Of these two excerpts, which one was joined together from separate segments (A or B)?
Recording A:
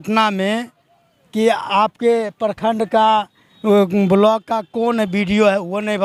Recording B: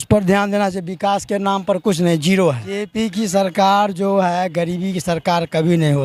B